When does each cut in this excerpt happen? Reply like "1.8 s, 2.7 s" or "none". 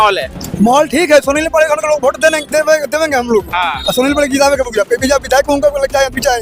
none